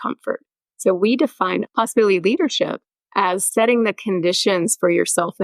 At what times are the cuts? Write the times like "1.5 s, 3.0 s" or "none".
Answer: 1.7 s